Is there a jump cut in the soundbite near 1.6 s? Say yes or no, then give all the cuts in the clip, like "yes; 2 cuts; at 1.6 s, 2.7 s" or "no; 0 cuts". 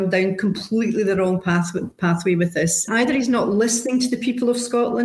no; 1 cut; at 2.9 s